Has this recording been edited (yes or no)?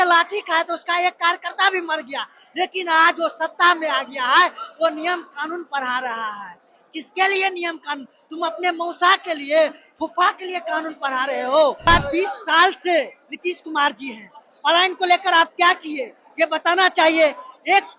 yes